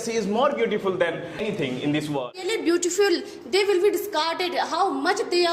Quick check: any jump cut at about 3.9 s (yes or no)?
no